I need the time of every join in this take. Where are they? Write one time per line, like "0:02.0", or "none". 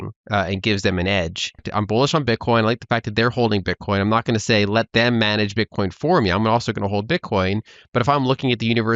0:01.7